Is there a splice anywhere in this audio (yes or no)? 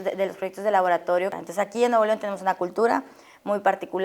yes